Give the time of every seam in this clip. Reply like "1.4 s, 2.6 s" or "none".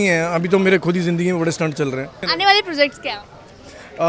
2.3 s